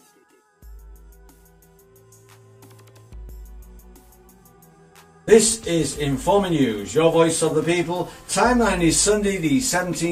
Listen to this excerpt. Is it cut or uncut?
uncut